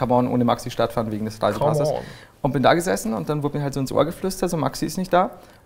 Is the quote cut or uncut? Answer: cut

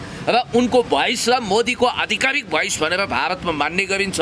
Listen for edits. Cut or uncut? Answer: uncut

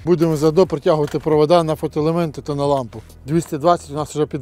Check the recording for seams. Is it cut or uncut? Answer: uncut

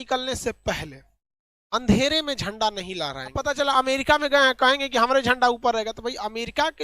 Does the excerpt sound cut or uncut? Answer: cut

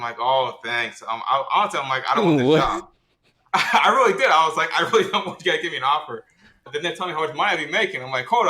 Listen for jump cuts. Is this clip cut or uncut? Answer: cut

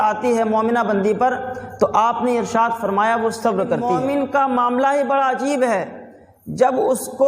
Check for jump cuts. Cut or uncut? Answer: cut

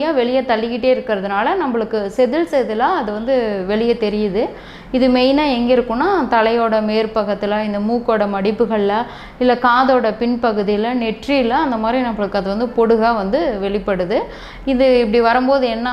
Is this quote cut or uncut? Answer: uncut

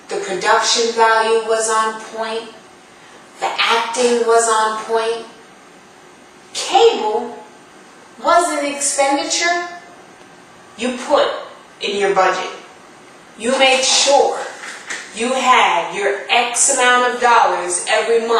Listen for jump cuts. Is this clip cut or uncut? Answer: uncut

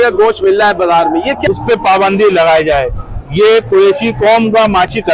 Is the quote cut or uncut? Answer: cut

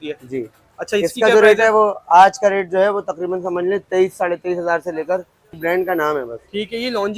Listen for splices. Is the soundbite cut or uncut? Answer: cut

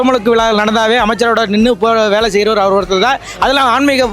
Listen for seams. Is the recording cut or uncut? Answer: uncut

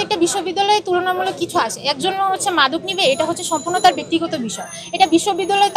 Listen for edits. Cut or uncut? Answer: uncut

